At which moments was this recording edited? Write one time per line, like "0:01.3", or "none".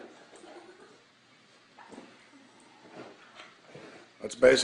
0:03.3